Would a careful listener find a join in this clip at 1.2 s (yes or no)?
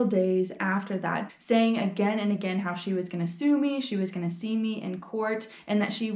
yes